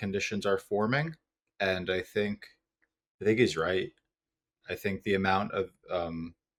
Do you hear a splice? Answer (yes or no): no